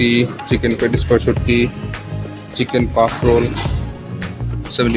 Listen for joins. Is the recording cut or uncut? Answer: uncut